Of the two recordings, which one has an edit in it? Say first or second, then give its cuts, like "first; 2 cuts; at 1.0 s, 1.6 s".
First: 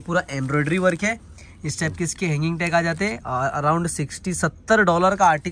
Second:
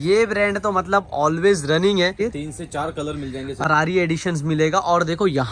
second; 2 cuts; at 2.1 s, 3.6 s